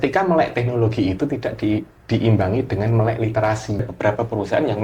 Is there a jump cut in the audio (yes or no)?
yes